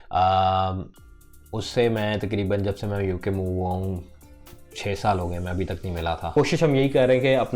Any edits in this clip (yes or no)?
yes